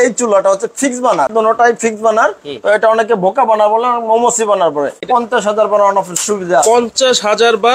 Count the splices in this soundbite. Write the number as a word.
two